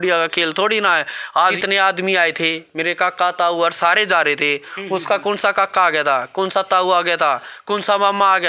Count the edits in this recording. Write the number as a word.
one